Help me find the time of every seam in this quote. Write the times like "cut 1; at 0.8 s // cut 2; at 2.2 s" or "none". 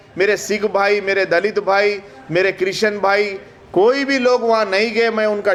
none